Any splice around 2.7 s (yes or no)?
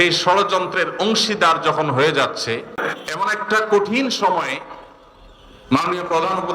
yes